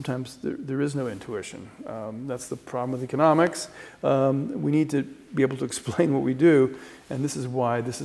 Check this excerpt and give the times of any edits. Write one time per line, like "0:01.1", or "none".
none